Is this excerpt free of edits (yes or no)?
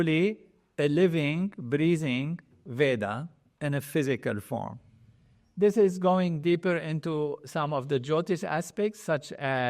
yes